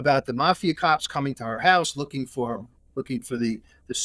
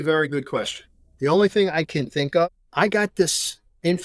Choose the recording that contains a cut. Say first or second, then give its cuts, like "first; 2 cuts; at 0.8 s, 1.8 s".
second; 1 cut; at 2.4 s